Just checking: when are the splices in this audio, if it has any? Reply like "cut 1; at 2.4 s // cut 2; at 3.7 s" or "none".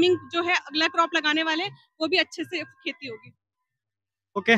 none

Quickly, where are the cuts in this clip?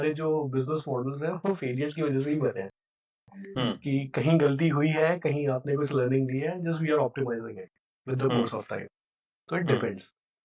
none

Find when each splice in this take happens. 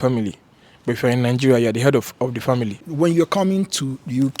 cut 1; at 2.9 s

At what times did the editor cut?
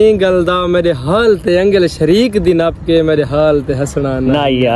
none

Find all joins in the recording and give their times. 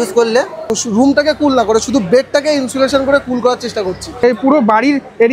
cut 1; at 0.7 s // cut 2; at 4.2 s

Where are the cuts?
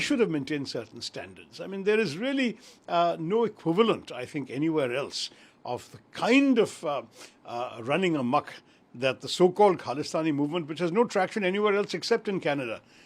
none

